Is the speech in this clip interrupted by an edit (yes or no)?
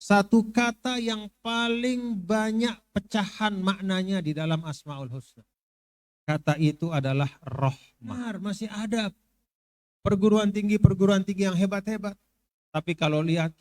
yes